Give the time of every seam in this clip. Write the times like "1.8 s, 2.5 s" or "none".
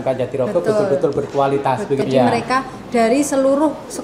2.0 s